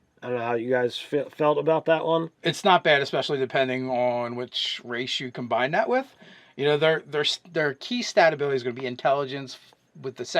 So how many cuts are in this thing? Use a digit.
1